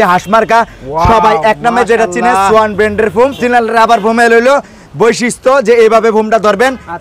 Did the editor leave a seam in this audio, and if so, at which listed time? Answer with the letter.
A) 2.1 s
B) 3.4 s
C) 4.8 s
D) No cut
B